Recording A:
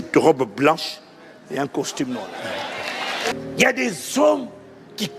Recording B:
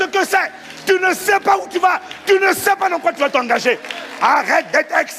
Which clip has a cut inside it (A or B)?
A